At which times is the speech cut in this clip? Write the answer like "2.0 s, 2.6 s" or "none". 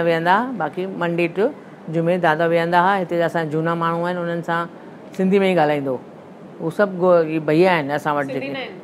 none